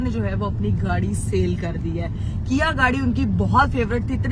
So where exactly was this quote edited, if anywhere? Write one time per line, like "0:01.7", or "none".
none